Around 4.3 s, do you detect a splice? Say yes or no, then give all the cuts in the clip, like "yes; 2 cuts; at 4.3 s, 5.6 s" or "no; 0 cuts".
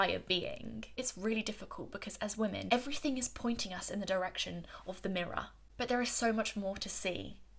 no; 3 cuts; at 1.1 s, 2.6 s, 5.6 s